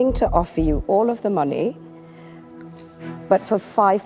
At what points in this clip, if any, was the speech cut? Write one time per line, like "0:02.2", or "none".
none